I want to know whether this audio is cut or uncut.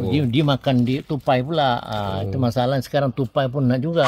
uncut